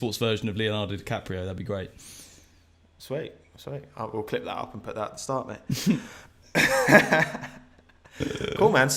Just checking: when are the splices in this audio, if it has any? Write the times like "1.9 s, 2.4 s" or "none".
none